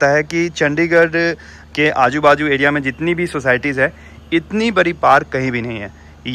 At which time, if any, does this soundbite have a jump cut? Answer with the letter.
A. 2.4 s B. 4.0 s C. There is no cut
C